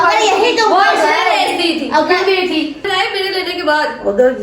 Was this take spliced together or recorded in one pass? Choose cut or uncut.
cut